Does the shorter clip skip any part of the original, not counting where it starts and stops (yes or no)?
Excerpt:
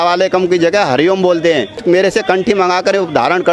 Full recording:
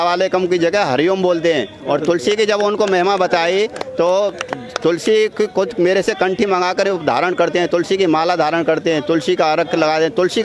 yes